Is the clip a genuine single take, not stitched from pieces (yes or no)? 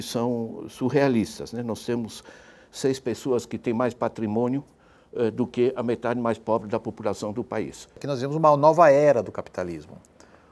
no